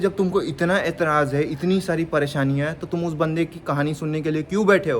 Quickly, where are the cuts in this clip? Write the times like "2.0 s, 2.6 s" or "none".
none